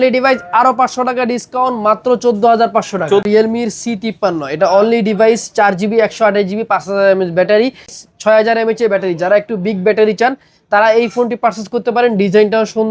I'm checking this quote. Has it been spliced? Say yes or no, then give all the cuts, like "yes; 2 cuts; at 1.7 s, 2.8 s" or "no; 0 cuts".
yes; 2 cuts; at 3.2 s, 8.0 s